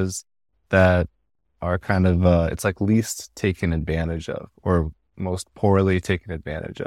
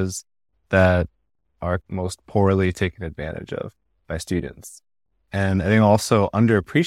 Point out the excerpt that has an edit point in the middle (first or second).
second